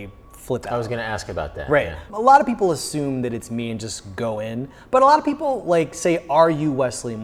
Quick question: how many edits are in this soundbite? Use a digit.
1